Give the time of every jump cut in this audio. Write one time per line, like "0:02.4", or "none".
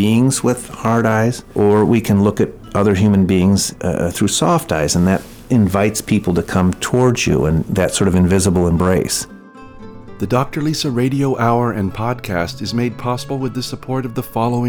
0:01.4
0:03.7
0:07.7
0:09.8